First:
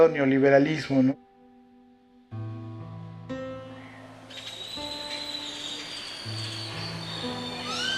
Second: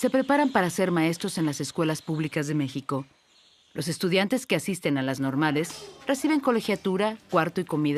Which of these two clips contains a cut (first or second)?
first